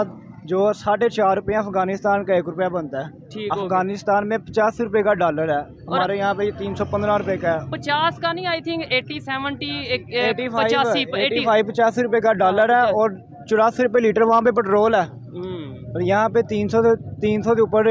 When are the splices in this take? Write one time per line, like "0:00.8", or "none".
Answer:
none